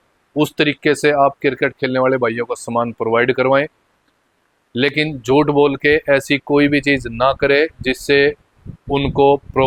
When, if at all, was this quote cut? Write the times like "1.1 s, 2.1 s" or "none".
none

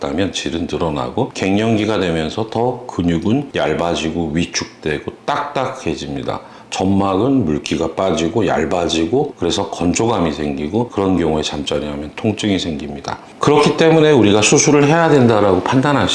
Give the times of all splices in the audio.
none

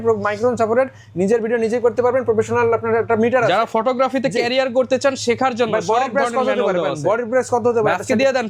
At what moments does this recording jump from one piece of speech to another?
none

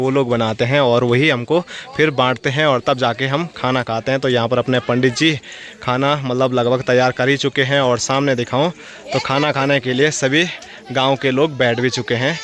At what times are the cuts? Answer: none

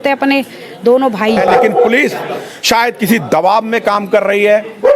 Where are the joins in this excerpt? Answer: 1.4 s

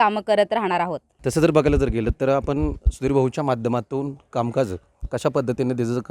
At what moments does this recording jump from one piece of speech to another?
none

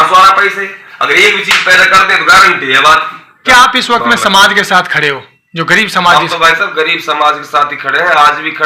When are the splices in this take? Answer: 3.4 s

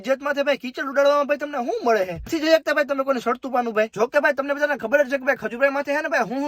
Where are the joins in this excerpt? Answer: 2.3 s, 3.9 s

